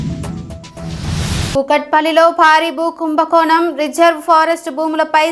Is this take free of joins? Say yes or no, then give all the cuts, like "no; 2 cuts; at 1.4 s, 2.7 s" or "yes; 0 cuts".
yes; 0 cuts